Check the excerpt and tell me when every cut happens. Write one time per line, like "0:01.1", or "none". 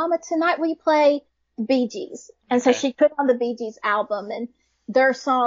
none